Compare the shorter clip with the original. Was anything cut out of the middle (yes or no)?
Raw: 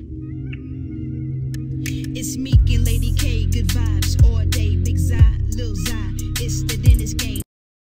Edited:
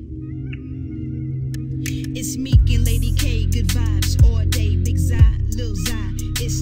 no